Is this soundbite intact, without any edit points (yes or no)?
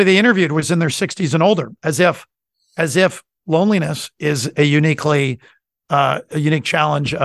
yes